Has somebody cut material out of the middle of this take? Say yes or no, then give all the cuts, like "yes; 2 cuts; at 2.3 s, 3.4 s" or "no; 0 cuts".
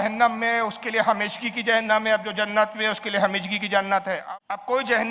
yes; 1 cut; at 4.2 s